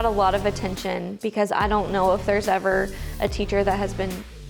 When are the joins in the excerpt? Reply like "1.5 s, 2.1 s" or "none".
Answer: 1.1 s